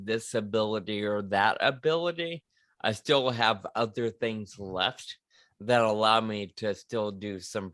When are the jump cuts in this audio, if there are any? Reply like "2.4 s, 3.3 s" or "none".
none